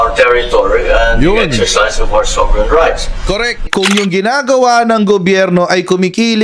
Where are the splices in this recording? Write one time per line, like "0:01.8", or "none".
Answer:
0:03.6